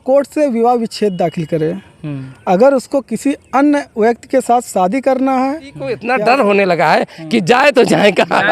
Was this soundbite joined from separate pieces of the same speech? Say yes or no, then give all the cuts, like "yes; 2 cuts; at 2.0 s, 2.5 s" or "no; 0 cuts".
yes; 1 cut; at 5.9 s